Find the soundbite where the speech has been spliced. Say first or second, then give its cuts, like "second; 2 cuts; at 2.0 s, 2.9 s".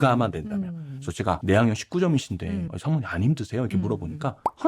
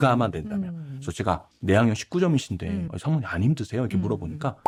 first; 1 cut; at 1.4 s